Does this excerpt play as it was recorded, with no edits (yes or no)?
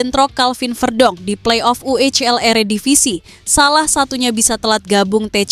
yes